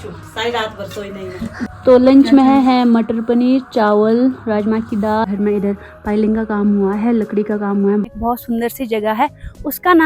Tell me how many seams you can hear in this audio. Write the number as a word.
three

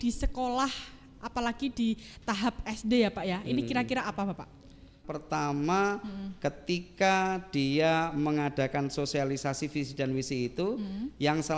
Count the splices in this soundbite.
one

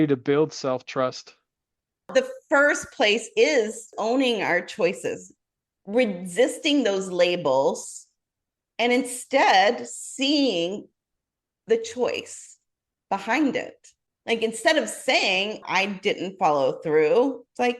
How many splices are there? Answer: three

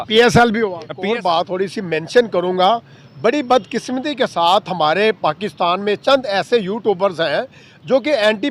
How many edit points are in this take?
one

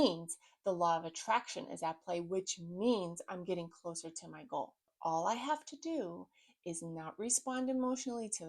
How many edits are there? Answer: one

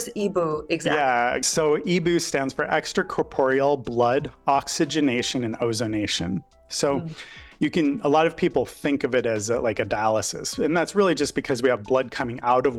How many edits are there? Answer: one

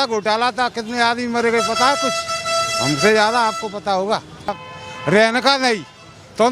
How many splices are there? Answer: one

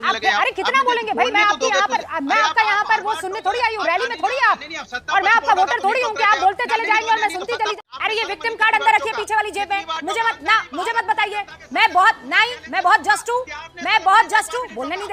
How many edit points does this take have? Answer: two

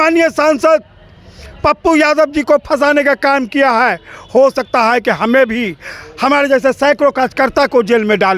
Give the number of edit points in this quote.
zero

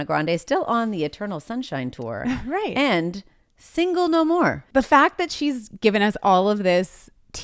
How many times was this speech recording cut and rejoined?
one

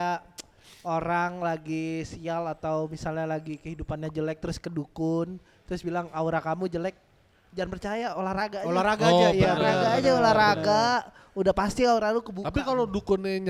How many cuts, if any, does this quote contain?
zero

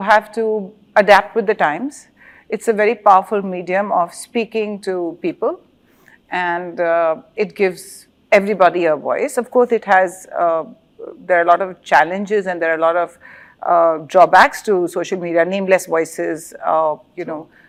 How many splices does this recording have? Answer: zero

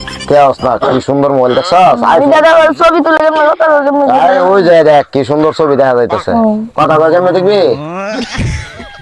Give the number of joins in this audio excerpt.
two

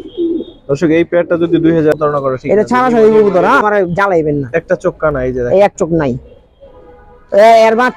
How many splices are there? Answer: two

